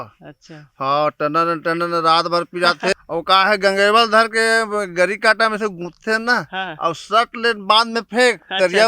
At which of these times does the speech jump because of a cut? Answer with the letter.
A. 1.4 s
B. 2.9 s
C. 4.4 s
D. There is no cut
B